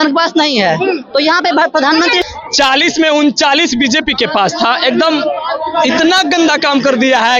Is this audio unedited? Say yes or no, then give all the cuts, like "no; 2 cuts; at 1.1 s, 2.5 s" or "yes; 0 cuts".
no; 1 cut; at 2.2 s